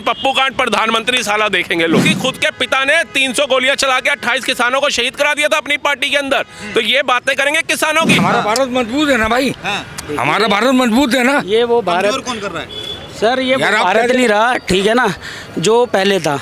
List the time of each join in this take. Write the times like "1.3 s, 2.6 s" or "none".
2.1 s, 8.2 s

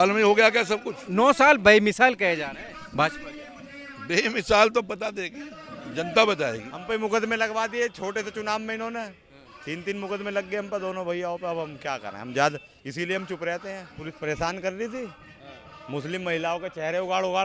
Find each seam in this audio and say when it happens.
1.0 s, 6.7 s, 14.2 s

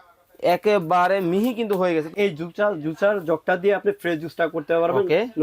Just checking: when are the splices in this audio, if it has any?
2.1 s

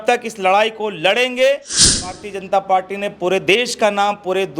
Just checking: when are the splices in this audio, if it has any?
2.1 s

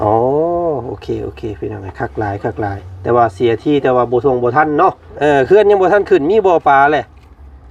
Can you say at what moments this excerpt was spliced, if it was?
5.1 s

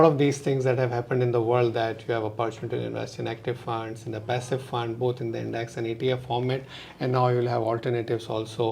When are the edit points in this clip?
none

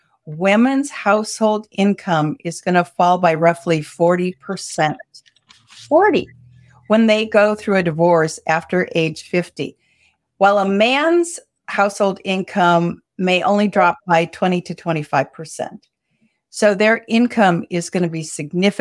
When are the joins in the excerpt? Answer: none

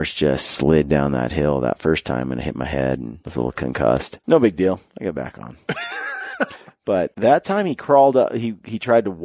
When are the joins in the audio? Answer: 3.2 s, 4.1 s, 4.9 s, 6.7 s

